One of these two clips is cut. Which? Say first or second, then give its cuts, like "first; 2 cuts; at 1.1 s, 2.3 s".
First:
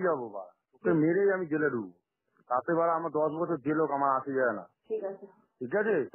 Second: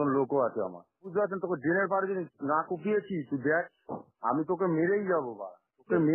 second; 1 cut; at 1.1 s